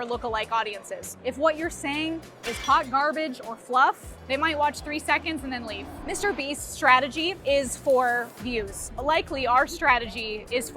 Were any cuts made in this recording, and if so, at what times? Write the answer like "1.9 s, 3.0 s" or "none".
1.2 s, 4.2 s, 5.9 s

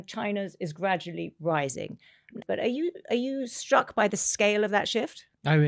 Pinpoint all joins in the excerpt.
2.4 s

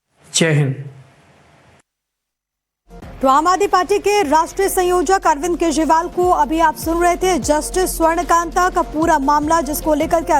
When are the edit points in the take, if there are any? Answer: 6.1 s

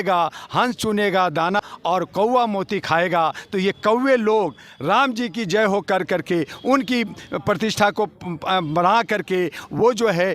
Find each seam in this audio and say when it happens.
1.6 s

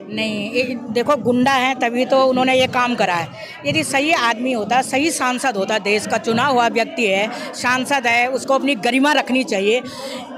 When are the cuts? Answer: none

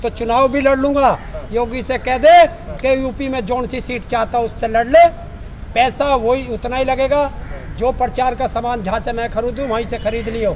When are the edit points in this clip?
none

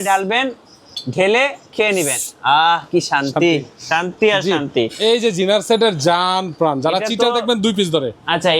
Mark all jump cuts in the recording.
4.9 s

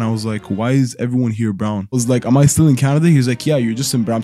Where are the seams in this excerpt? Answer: 2.0 s

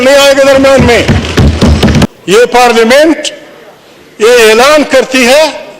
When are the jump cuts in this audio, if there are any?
2.1 s

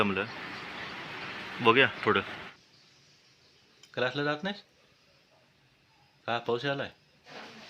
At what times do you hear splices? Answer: 2.5 s

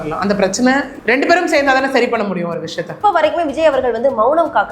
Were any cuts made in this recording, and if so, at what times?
0.9 s, 2.9 s

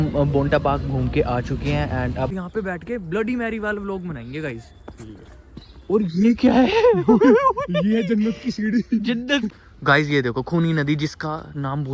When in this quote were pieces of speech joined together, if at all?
2.3 s, 9.5 s

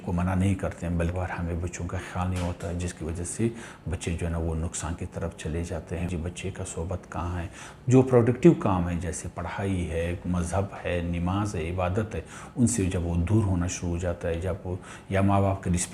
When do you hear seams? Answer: 1.1 s, 6.0 s

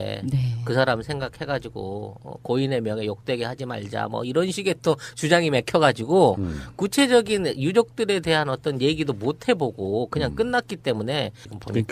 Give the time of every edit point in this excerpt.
6.8 s

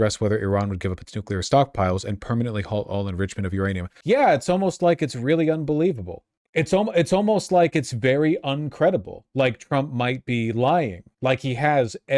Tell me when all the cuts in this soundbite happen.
3.9 s

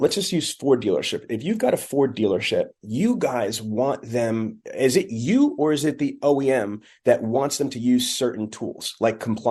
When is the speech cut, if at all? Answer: none

